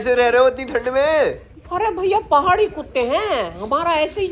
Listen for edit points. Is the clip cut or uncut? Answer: uncut